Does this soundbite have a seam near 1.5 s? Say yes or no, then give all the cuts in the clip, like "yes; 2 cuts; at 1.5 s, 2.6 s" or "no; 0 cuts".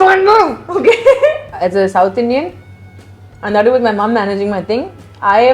yes; 1 cut; at 1.5 s